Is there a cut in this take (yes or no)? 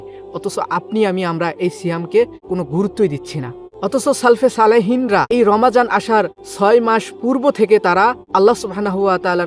yes